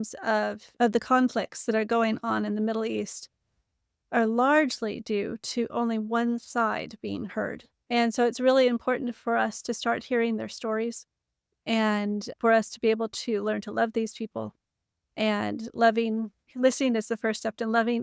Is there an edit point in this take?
yes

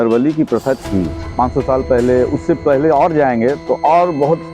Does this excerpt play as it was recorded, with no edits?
no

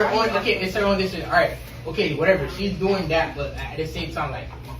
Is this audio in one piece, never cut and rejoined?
no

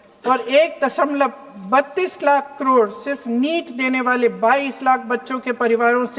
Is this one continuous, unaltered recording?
yes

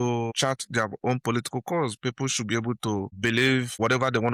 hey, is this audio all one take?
yes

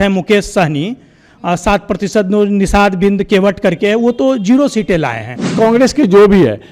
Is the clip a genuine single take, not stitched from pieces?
no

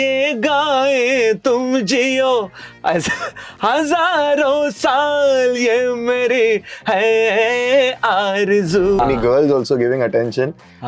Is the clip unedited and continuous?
no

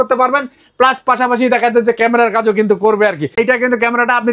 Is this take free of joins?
no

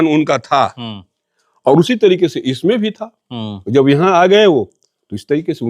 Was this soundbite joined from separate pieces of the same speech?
no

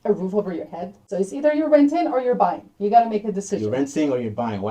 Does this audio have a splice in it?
yes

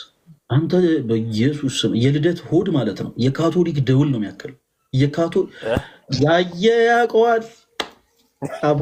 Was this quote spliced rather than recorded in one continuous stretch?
no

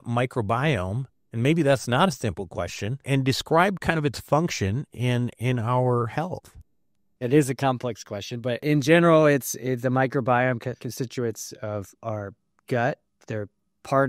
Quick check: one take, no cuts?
yes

